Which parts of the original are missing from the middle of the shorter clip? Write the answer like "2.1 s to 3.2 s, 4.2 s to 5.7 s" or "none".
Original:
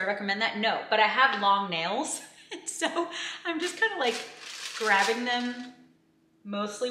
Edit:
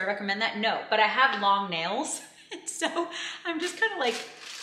none